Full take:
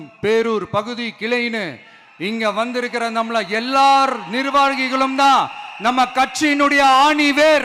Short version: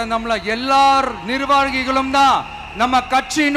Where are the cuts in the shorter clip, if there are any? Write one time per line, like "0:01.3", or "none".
none